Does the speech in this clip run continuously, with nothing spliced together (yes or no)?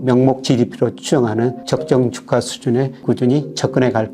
no